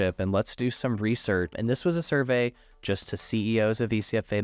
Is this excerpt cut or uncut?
cut